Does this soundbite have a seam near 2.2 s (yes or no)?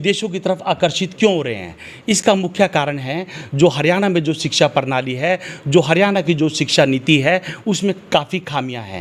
no